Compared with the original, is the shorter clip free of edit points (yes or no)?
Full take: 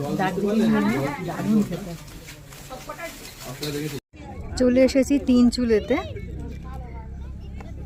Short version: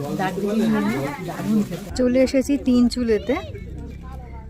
no